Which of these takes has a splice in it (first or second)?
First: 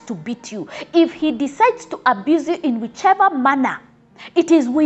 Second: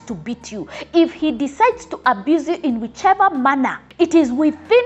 second